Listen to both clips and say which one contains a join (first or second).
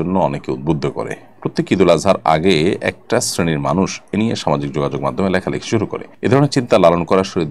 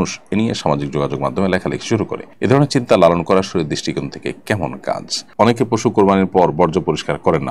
second